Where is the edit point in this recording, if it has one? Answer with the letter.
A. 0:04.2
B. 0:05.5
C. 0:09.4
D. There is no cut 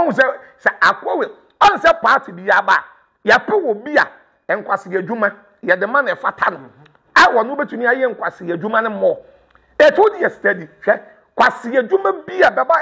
D